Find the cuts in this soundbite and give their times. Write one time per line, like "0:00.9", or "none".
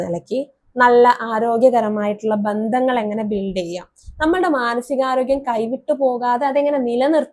none